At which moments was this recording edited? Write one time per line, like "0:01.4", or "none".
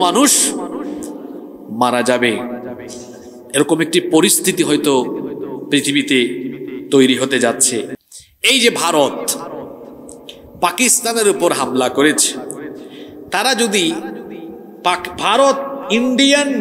0:07.9